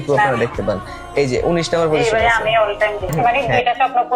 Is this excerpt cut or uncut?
cut